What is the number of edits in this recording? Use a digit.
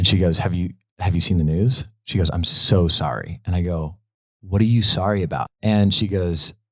1